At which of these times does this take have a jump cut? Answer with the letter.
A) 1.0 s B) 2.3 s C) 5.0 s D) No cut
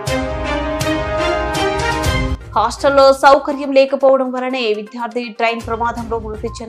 B